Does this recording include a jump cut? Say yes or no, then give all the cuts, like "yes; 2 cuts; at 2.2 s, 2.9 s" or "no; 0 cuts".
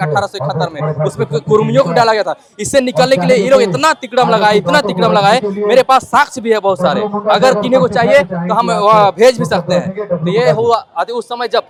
no; 0 cuts